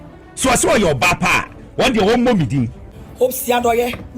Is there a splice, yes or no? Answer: yes